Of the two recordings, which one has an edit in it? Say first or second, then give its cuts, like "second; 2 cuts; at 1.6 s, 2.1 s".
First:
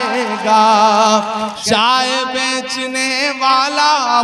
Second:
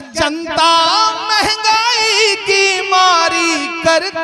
first; 1 cut; at 1.6 s